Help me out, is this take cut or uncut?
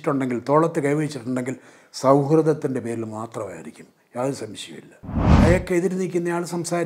cut